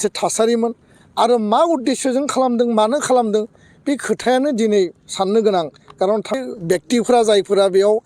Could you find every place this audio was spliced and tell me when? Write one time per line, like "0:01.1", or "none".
0:06.4